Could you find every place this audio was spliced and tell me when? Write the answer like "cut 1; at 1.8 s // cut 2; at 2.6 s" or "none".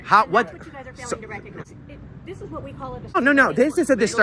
cut 1; at 1.6 s // cut 2; at 3.2 s